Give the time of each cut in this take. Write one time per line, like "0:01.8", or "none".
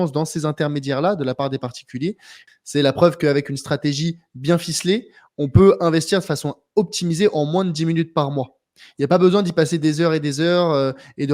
0:02.3